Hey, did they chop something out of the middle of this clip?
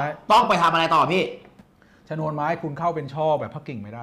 yes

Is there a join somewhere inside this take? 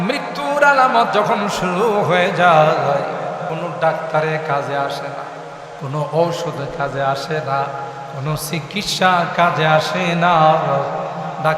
yes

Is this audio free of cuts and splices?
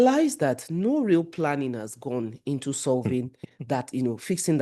yes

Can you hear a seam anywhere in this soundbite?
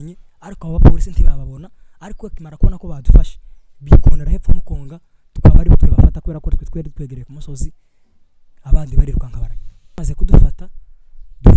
yes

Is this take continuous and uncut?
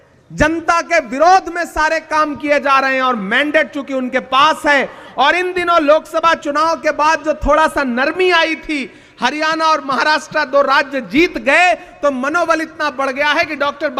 yes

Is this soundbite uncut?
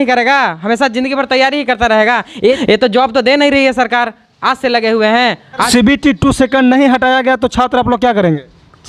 no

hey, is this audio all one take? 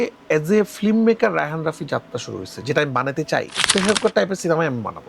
no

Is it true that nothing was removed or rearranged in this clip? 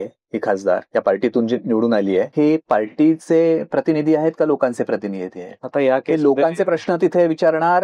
no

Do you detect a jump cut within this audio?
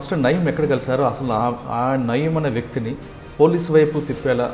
no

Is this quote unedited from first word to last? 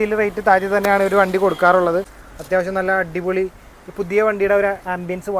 no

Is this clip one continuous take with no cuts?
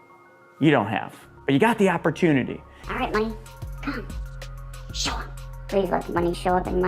no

